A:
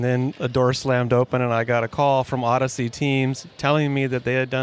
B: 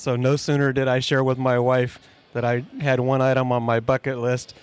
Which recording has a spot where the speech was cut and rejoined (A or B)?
A